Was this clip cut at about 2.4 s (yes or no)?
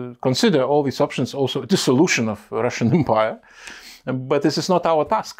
no